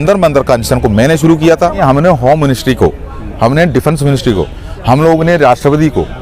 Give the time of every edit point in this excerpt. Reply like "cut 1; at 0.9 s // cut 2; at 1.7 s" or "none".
cut 1; at 1.8 s